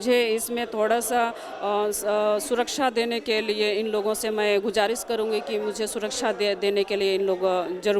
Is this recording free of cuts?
yes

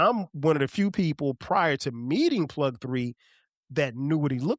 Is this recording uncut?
yes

